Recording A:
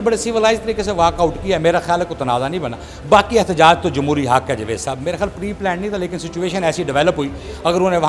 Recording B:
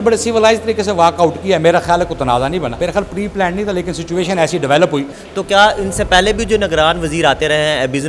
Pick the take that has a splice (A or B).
B